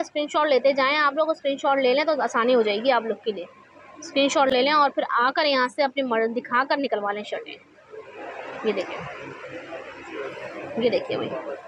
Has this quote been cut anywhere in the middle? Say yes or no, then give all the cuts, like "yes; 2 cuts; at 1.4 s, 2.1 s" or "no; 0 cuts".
no; 0 cuts